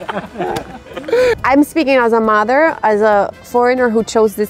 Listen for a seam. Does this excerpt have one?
yes; 1 cut; at 1.3 s

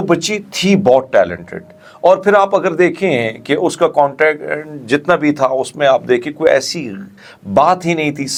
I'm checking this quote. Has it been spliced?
no; 0 cuts

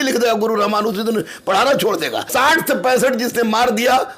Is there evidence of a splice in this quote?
yes; 1 cut; at 2.3 s

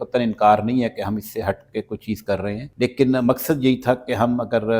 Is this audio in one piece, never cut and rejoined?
no; 1 cut; at 2.7 s

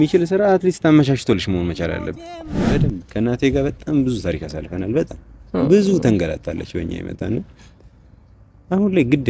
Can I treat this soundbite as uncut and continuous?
no; 1 cut; at 2.7 s

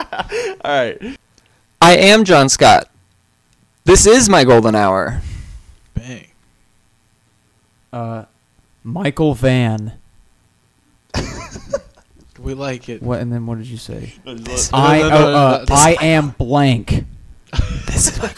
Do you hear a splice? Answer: yes; 1 cut; at 1.1 s

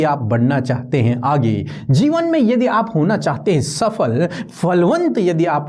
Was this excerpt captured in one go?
yes; 0 cuts

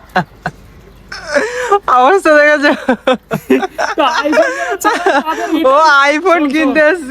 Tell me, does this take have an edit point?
no; 0 cuts

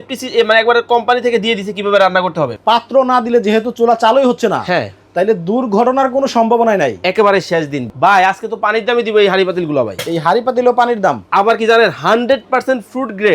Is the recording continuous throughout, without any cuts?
no; 2 cuts; at 2.6 s, 7.9 s

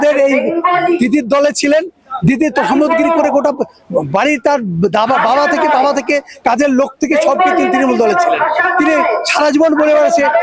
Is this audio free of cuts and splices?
yes; 0 cuts

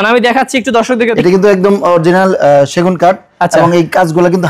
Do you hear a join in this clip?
yes; 1 cut; at 1.1 s

